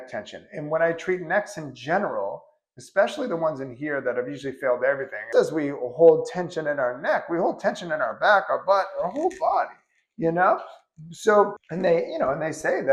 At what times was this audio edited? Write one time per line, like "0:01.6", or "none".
0:05.2